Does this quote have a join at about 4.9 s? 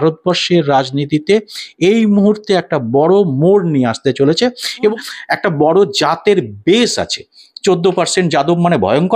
yes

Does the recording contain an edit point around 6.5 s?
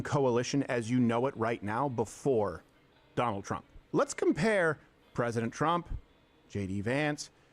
no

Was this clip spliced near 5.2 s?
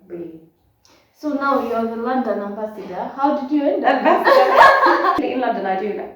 yes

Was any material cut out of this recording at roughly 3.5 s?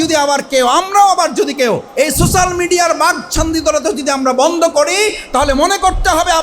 no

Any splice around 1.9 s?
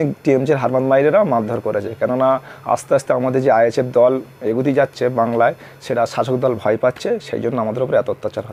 no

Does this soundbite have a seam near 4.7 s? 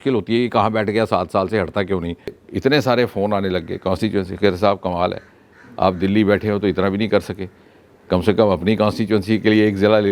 no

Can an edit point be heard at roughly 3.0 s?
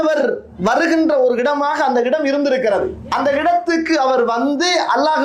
yes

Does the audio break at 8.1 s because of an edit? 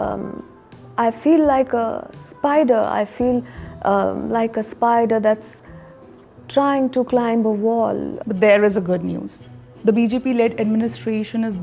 yes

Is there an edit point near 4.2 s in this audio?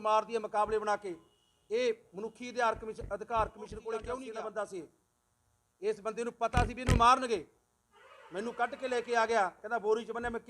yes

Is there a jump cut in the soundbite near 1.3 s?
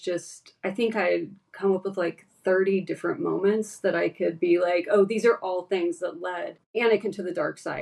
no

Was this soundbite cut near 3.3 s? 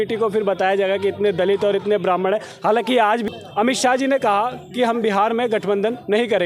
yes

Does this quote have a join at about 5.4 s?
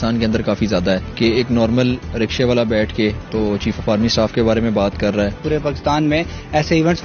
yes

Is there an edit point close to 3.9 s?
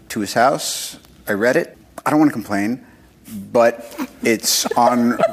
no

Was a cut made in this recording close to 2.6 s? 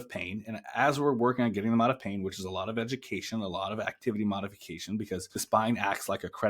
no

